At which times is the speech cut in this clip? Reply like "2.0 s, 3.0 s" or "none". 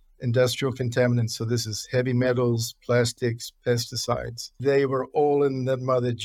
4.6 s

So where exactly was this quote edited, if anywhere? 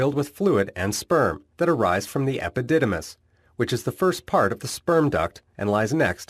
4.1 s

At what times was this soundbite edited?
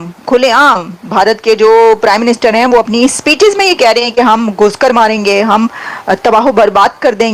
none

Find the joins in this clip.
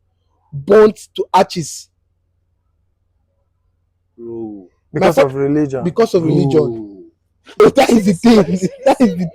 7.6 s

